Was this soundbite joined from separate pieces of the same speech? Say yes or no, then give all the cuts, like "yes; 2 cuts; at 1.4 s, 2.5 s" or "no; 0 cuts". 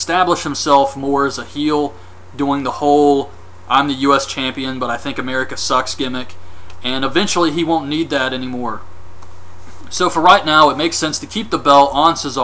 no; 0 cuts